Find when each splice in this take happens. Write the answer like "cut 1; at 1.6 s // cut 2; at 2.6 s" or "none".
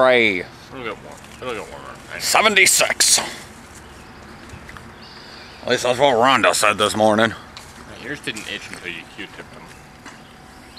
none